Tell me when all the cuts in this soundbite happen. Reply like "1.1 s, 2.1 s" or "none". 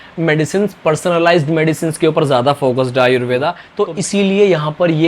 3.6 s